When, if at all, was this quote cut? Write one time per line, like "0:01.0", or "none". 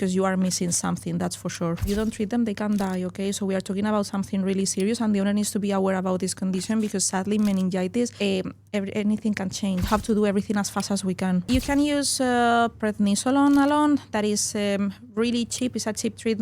0:01.9
0:08.1
0:09.9
0:11.5